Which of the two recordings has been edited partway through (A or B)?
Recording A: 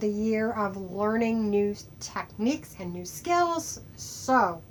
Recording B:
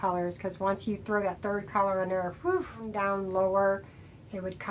B